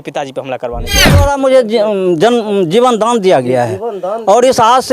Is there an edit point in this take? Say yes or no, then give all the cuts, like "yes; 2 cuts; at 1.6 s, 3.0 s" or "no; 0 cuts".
yes; 1 cut; at 1.2 s